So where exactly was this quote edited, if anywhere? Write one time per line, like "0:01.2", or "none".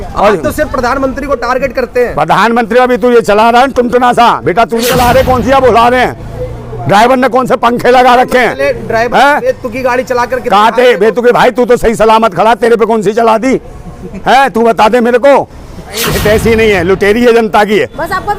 0:04.9
0:16.1